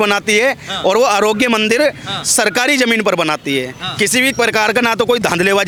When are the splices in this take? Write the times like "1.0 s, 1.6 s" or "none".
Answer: none